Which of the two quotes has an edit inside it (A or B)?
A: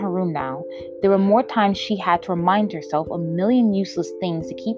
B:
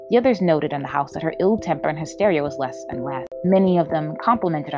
B